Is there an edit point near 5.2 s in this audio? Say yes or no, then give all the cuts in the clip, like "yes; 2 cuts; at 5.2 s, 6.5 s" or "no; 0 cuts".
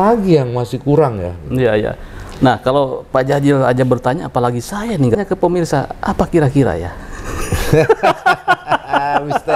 yes; 1 cut; at 5.2 s